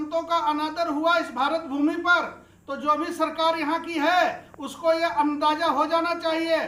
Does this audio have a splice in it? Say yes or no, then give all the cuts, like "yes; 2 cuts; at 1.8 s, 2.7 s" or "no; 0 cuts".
no; 0 cuts